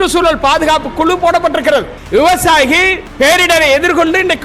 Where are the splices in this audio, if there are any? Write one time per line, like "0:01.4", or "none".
0:02.0
0:03.0